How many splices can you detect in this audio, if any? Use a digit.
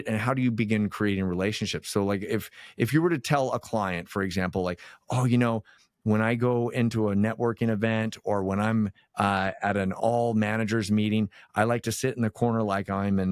0